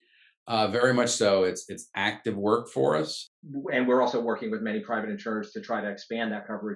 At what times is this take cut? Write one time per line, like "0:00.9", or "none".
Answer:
0:03.3